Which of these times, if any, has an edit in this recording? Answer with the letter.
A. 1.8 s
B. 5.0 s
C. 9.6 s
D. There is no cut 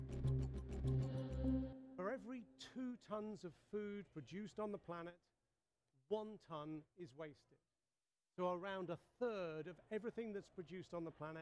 A